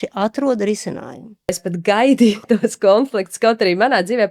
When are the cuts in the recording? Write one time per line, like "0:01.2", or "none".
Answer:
0:01.6